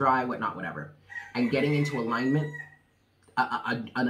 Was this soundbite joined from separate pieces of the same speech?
no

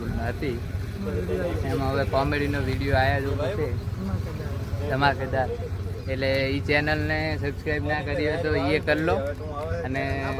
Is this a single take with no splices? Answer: yes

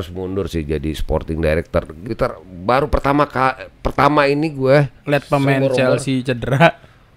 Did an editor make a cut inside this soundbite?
yes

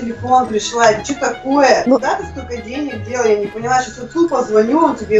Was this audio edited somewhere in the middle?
yes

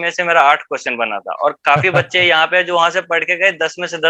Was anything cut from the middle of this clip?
no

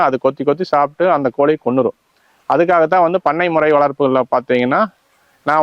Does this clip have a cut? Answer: no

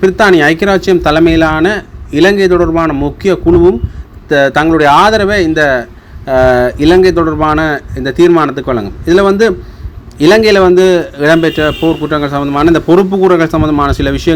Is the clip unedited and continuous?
yes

